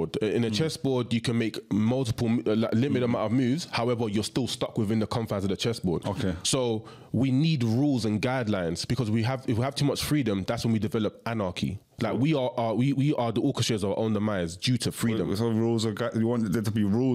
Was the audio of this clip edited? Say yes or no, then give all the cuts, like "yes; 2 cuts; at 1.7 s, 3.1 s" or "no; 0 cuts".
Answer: no; 0 cuts